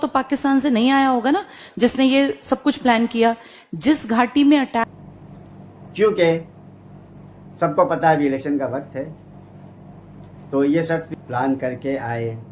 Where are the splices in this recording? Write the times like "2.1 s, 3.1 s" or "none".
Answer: 4.9 s, 11.1 s